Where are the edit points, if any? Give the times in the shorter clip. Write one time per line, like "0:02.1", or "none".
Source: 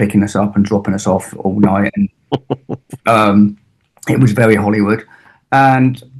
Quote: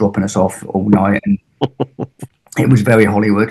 0:02.2